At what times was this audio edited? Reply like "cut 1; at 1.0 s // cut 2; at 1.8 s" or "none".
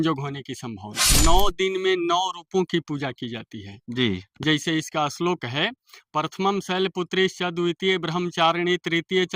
cut 1; at 1.0 s